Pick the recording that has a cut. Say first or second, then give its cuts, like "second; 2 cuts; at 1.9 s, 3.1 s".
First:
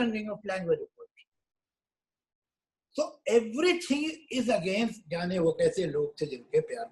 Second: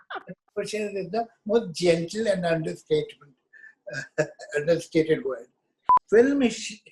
second; 1 cut; at 5.9 s